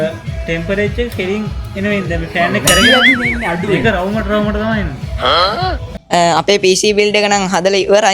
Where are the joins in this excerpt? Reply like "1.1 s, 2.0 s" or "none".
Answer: 6.0 s